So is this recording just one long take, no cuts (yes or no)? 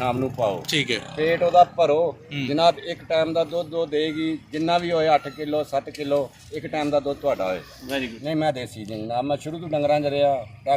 no